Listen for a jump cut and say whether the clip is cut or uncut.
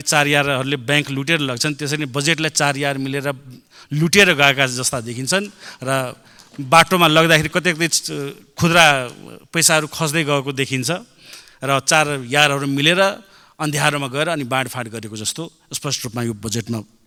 uncut